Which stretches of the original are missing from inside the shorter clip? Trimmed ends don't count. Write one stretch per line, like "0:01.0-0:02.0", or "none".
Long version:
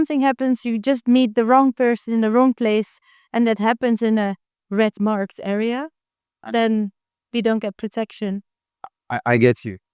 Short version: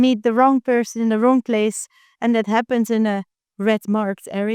none

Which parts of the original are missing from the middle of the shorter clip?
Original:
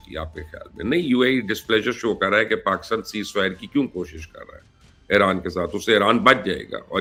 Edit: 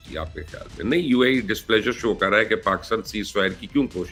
none

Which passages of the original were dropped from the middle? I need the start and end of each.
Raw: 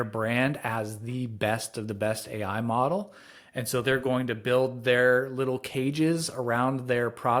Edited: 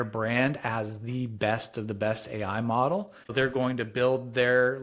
0:03.3-0:03.8

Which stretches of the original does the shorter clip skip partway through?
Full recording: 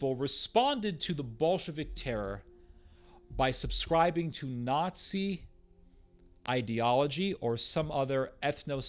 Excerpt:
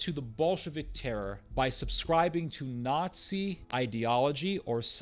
0:02.4-0:03.2
0:05.4-0:06.4

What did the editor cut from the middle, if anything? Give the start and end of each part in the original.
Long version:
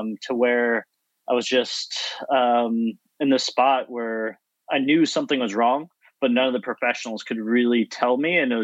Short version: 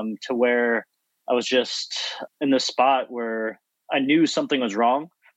0:02.2-0:03.0

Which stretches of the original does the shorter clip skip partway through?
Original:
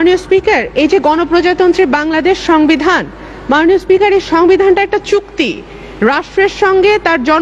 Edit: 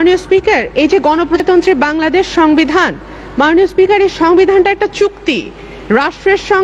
0:01.4-0:01.5

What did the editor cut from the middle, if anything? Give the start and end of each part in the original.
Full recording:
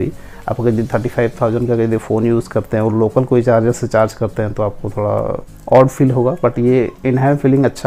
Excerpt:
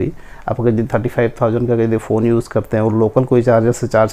none

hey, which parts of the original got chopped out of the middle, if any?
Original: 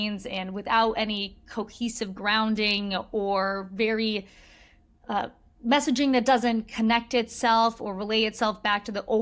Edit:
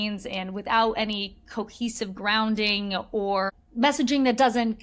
0:03.5-0:05.4

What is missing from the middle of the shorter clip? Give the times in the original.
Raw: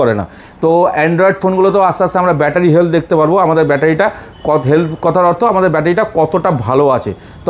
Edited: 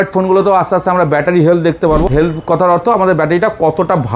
0:03.3-0:04.6

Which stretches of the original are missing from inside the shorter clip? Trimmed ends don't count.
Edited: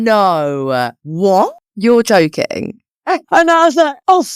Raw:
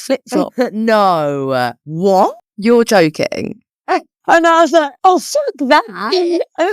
0:04.0-0:04.2

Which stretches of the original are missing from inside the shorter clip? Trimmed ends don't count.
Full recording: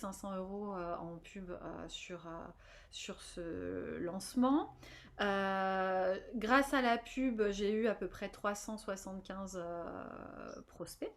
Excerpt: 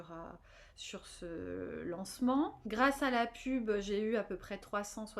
0:04.8-0:06.3

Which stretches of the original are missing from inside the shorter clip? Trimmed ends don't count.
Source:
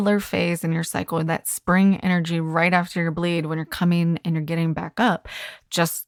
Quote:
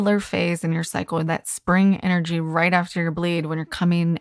none

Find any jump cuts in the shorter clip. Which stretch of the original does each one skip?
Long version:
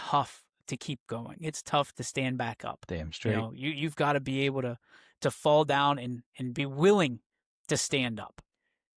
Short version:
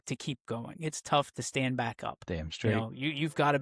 none

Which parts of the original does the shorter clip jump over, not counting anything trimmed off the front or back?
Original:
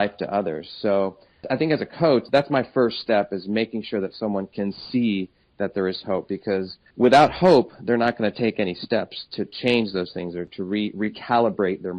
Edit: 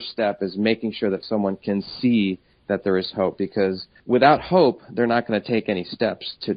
none

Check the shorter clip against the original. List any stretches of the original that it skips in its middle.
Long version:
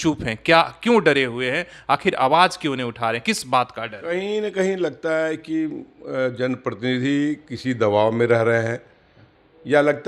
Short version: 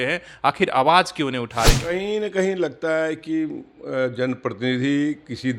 0:03.2-0:04.0

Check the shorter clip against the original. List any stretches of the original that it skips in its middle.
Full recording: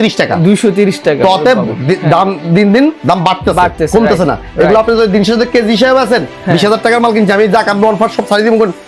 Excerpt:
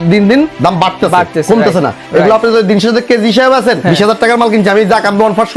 0:06.2-0:06.4

